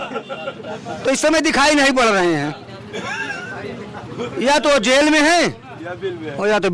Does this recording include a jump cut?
no; 0 cuts

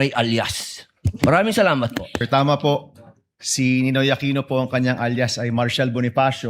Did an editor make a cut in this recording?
yes; 1 cut; at 2.2 s

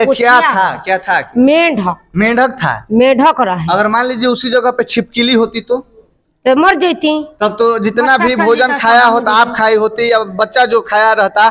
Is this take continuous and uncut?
yes; 0 cuts

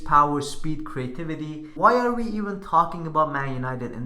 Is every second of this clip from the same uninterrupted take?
no; 1 cut; at 1.7 s

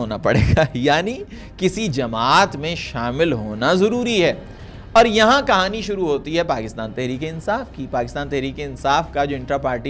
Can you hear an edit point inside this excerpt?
no; 0 cuts

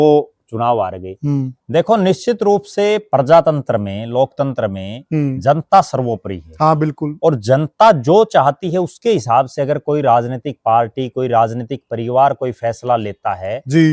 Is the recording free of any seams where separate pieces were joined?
no; 1 cut; at 1.5 s

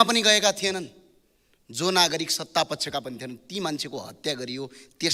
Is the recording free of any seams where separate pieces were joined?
yes; 0 cuts

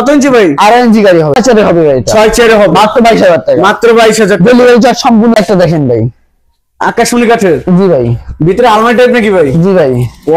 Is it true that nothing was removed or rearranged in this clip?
no; 2 cuts; at 1.4 s, 5.4 s

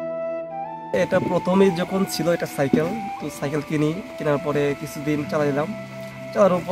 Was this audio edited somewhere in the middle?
yes; 1 cut; at 0.9 s

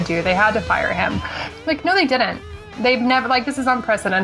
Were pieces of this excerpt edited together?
no; 0 cuts

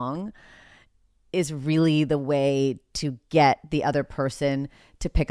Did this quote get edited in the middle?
no; 0 cuts

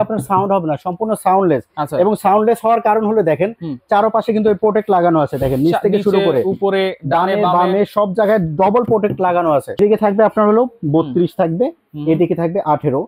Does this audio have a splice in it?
yes; 1 cut; at 9.7 s

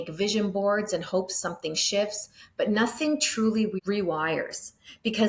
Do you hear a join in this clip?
yes; 1 cut; at 3.8 s

